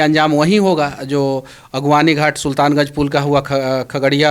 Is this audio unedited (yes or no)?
yes